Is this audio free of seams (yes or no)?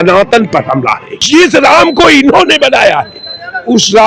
no